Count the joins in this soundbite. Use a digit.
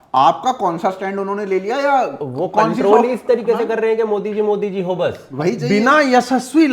1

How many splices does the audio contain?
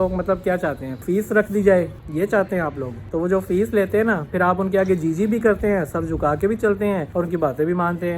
4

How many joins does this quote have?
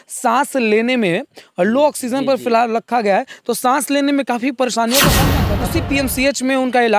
1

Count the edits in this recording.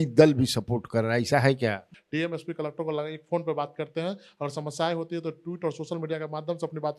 1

